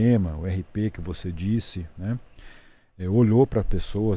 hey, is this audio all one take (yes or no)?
yes